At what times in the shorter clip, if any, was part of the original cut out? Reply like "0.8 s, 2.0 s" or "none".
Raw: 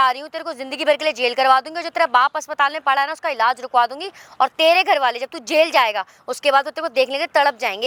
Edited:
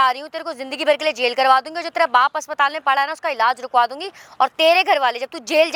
none